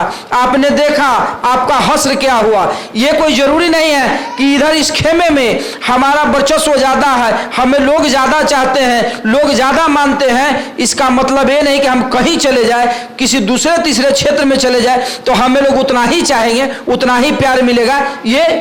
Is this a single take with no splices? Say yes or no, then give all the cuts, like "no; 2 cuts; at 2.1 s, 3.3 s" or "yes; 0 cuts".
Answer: yes; 0 cuts